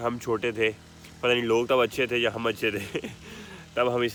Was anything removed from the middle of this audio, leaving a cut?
no; 0 cuts

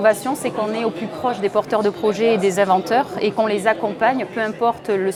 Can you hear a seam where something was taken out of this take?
no; 0 cuts

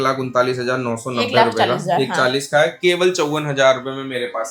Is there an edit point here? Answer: no; 0 cuts

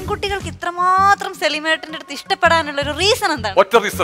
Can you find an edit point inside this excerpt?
no; 0 cuts

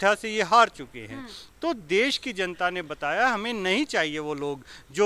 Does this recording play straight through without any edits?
yes; 0 cuts

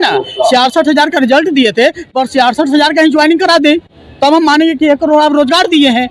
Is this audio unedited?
yes; 0 cuts

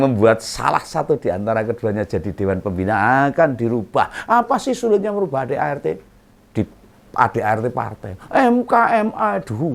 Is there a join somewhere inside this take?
no; 0 cuts

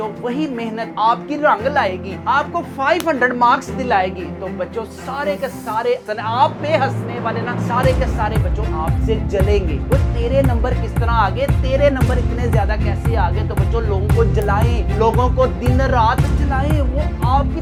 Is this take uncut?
yes; 0 cuts

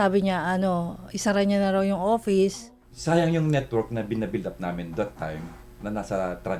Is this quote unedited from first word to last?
no; 1 cut; at 2.9 s

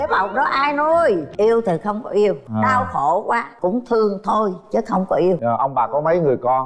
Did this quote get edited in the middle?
yes; 4 cuts; at 1.3 s, 2.4 s, 3.5 s, 5.4 s

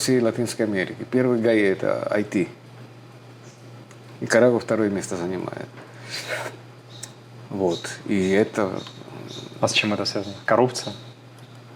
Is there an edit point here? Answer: no; 0 cuts

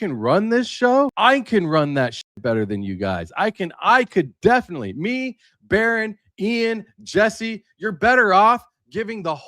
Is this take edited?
no; 0 cuts

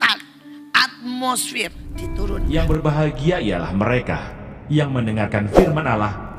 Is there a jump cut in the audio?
yes; 1 cut; at 2.4 s

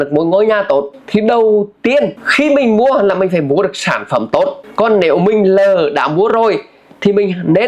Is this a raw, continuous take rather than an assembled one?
no; 3 cuts; at 1.0 s, 2.2 s, 4.6 s

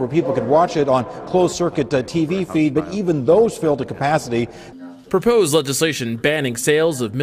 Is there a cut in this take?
no; 0 cuts

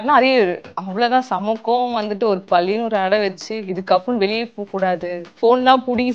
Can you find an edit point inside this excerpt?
yes; 1 cut; at 5.2 s

